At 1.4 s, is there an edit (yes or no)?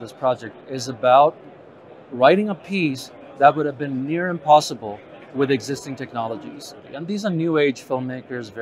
no